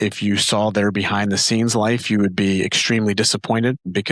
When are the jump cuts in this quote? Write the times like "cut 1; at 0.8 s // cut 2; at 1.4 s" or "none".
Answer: none